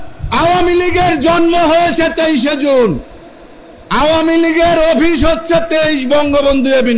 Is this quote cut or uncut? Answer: uncut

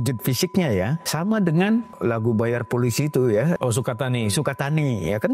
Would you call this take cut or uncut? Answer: cut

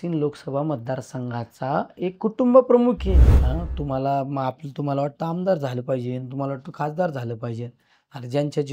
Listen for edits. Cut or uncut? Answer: cut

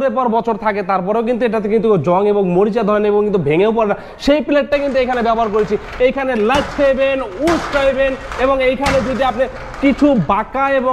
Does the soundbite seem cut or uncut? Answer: uncut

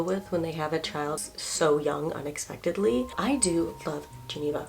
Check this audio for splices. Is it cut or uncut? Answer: cut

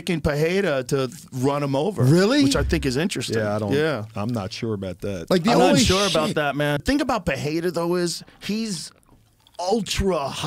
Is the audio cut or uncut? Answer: uncut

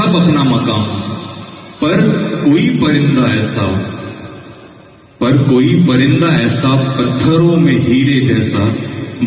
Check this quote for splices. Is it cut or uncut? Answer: uncut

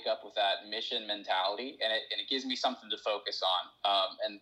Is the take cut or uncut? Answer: uncut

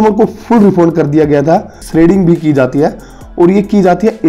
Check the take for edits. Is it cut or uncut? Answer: cut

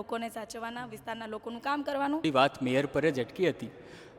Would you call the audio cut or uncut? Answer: cut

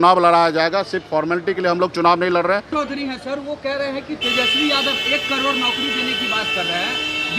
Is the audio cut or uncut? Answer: cut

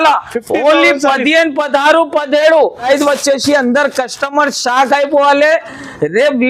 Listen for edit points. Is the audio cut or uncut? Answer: cut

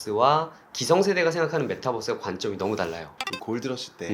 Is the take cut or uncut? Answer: cut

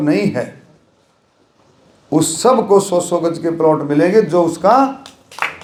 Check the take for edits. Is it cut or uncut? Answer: uncut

